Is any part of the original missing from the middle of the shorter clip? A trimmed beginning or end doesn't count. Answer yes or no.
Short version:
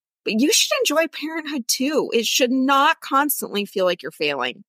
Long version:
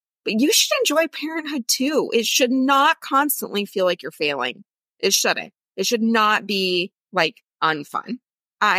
no